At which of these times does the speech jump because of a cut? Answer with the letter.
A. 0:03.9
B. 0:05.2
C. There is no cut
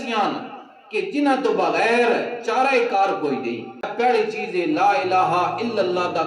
A